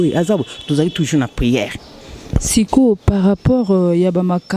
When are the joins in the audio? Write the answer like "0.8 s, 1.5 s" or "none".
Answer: none